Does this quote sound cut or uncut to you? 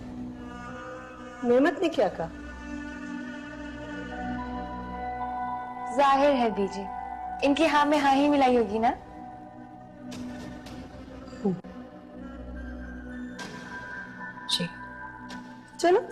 uncut